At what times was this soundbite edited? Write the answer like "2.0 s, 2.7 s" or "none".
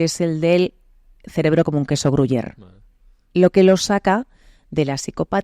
none